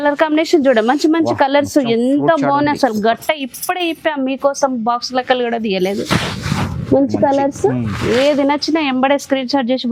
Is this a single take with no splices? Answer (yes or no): yes